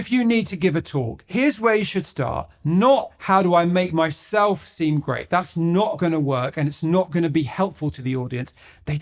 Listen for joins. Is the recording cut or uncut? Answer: cut